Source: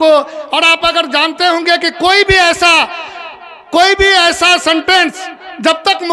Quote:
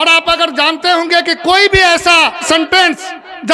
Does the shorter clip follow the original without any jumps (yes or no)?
no